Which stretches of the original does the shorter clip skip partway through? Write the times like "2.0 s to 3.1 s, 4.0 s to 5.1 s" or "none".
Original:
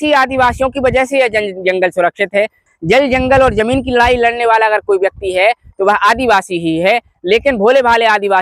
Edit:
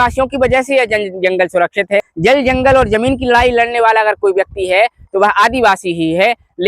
2.5 s to 2.8 s